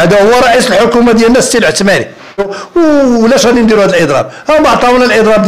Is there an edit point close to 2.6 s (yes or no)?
yes